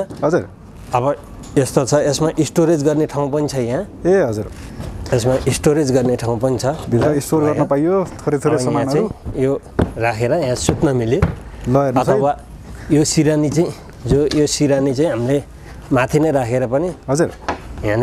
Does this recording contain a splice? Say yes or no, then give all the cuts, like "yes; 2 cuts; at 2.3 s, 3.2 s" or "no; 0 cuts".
no; 0 cuts